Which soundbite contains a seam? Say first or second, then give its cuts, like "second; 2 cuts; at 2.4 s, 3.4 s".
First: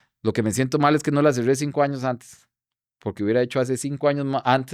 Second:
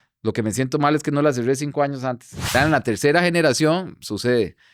second; 1 cut; at 2.5 s